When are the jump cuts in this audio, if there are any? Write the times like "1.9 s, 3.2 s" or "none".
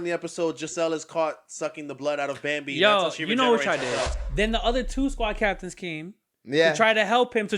4.2 s